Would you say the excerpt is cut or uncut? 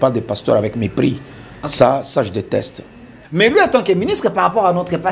cut